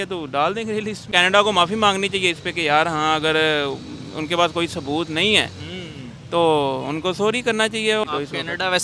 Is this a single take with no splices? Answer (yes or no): no